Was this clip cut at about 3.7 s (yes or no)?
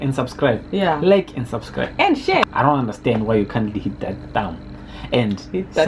no